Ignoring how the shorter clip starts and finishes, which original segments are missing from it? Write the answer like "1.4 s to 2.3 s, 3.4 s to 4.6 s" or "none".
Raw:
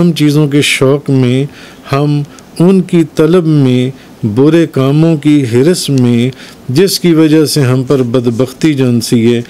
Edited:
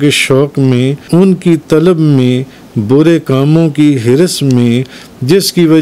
1.5 s to 2.5 s